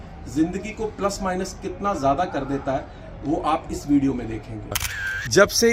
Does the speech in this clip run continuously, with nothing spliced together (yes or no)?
no